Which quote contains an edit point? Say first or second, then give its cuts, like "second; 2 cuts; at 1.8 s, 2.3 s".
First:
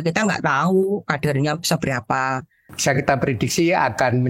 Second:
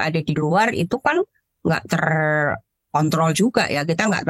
first; 1 cut; at 2.7 s